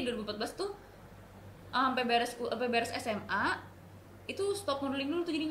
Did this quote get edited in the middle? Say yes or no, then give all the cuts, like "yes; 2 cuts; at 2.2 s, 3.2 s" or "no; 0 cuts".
no; 0 cuts